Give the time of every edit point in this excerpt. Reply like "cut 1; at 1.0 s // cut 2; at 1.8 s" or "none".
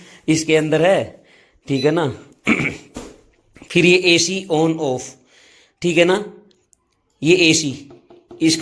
none